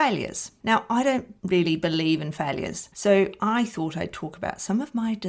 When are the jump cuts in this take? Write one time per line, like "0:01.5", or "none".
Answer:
0:01.3
0:02.9